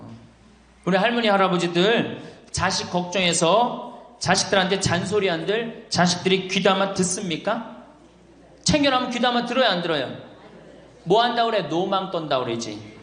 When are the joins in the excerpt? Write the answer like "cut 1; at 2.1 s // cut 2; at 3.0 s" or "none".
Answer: none